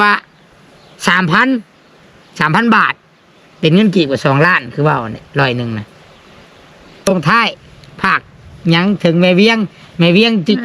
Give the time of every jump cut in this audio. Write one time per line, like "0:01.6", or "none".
0:07.1